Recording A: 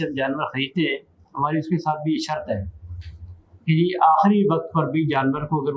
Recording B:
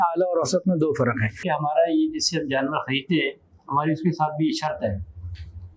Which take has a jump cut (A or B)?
B